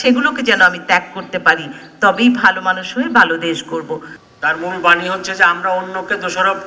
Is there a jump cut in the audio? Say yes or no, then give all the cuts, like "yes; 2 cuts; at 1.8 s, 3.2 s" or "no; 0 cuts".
yes; 1 cut; at 4.2 s